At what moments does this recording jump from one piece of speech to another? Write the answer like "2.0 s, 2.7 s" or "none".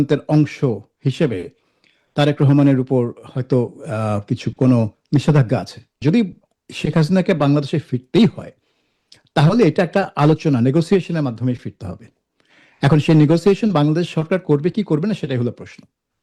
6.0 s